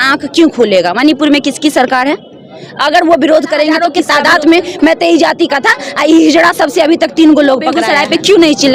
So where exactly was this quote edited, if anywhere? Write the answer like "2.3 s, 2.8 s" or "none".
3.9 s, 7.8 s